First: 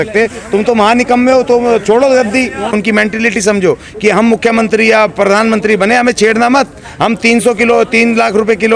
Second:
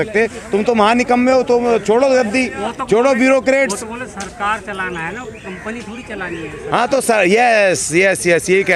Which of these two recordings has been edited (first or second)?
first